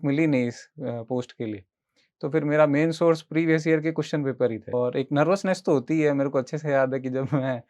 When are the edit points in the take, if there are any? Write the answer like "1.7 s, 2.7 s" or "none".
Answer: 4.7 s